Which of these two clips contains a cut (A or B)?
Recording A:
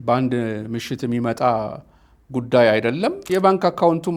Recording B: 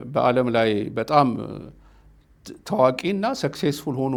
A